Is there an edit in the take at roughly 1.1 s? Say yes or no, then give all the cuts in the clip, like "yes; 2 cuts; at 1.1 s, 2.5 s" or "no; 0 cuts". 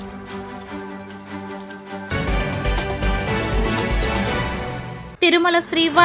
yes; 1 cut; at 1.1 s